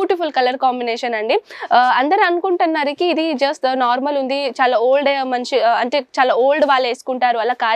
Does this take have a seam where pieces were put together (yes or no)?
no